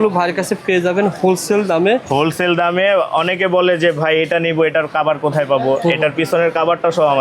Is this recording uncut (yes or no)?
yes